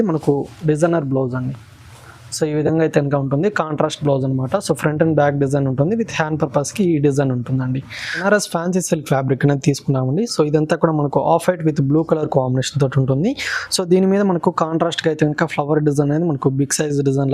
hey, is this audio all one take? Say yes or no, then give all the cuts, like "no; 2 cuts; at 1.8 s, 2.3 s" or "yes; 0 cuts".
no; 1 cut; at 8.2 s